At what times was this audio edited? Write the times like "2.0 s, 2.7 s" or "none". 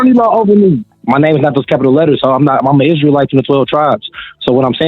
0.9 s